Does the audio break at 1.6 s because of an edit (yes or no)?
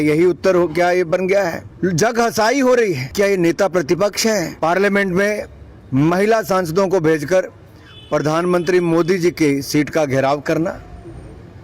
yes